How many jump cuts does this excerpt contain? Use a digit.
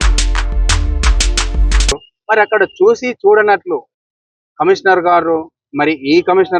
1